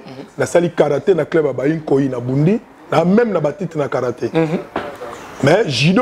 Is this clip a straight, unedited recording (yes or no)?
yes